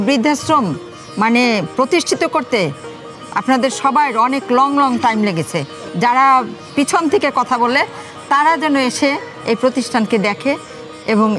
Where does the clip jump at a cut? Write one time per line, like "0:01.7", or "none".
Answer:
none